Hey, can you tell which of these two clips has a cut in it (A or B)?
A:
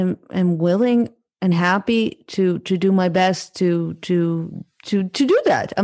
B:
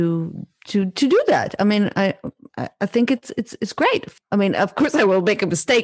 B